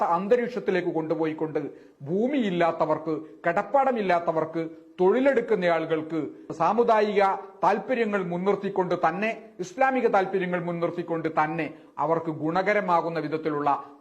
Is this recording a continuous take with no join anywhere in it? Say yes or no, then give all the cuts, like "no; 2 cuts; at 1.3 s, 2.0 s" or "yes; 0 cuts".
no; 1 cut; at 6.5 s